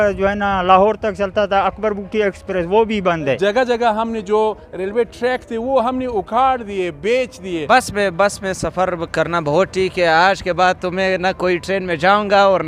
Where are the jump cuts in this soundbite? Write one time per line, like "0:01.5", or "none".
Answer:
0:03.4
0:07.6